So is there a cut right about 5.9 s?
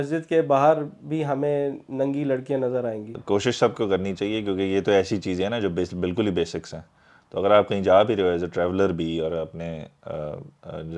no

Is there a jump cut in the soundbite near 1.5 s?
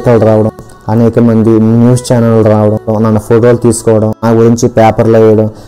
no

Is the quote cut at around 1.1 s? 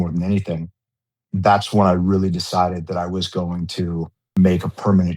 yes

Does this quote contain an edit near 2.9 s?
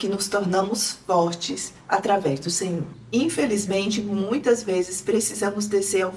yes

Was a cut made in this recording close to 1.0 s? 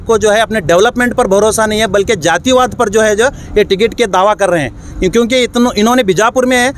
no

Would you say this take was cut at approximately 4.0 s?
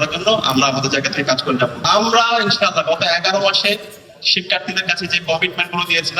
no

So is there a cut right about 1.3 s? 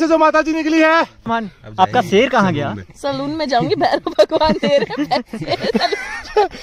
yes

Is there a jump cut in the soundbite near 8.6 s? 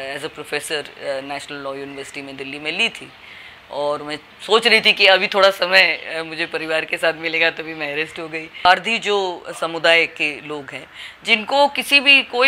yes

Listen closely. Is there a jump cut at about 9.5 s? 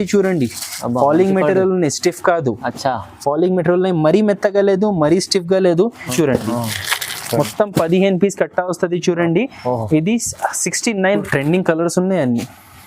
no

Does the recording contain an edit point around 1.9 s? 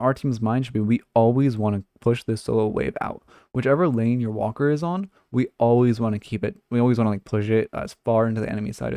yes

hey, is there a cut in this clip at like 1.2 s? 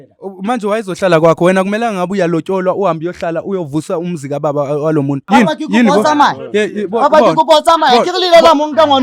no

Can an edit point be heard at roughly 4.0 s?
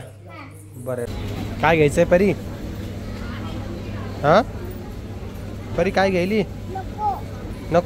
no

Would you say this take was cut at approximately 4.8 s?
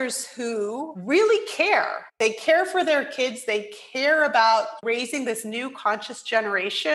yes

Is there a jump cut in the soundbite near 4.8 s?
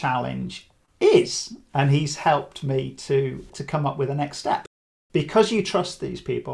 yes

